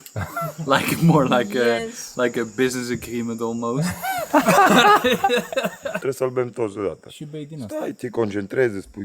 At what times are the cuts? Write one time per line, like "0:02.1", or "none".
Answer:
0:05.9

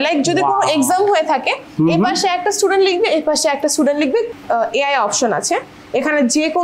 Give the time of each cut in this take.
0:04.3

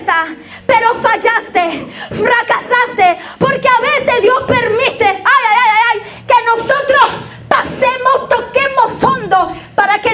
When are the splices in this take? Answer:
none

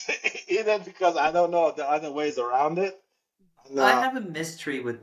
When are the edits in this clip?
0:04.0

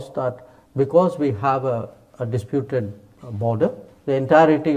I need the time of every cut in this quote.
none

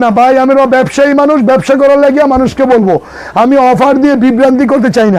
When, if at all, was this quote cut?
none

